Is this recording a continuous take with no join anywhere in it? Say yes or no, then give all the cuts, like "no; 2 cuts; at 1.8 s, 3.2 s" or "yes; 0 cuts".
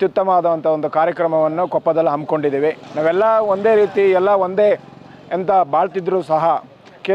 no; 1 cut; at 2.9 s